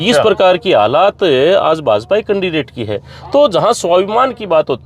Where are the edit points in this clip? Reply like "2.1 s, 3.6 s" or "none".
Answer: none